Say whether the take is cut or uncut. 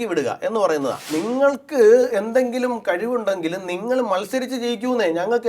cut